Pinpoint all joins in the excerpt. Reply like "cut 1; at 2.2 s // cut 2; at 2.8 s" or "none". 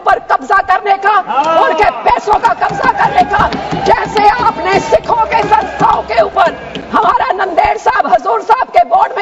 none

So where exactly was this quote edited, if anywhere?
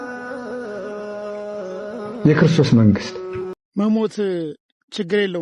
cut 1; at 3.6 s

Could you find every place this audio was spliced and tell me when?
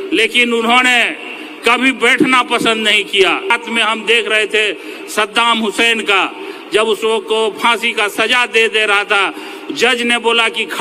cut 1; at 3.5 s

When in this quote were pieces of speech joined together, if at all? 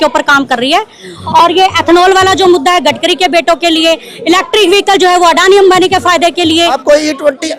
cut 1; at 1.1 s // cut 2; at 6.8 s

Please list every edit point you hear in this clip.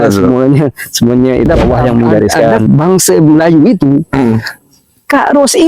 cut 1; at 2.6 s

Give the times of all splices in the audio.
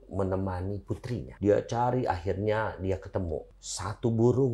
cut 1; at 1.3 s // cut 2; at 3.6 s

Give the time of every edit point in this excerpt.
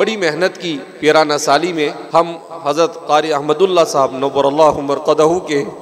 cut 1; at 2.0 s

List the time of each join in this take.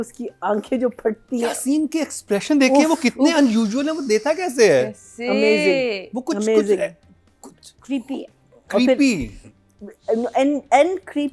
none

